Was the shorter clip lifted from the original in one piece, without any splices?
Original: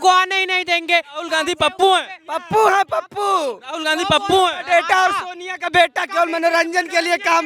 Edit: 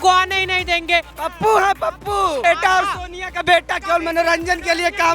no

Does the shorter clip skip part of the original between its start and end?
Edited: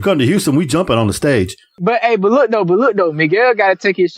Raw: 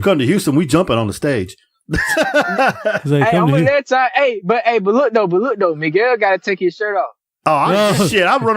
yes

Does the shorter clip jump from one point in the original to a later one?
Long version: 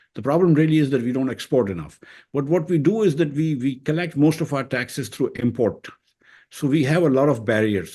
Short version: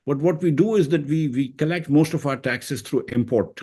no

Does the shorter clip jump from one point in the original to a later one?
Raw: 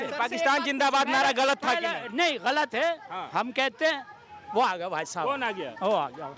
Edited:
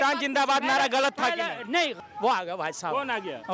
yes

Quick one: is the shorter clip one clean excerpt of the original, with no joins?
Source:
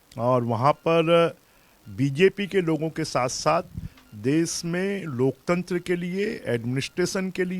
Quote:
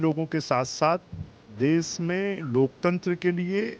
yes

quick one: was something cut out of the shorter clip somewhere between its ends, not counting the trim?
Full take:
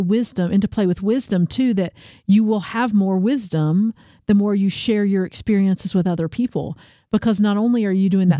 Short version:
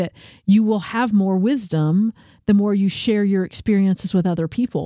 no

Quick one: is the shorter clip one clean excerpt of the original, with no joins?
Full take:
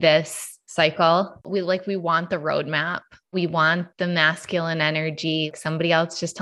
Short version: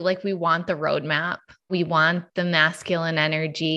yes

